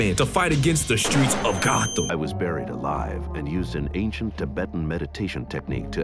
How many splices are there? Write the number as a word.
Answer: one